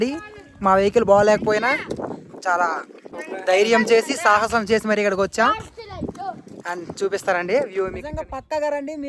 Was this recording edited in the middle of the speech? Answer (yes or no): yes